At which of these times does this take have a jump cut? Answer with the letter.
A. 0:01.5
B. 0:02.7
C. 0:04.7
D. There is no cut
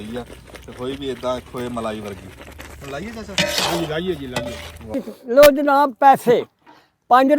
C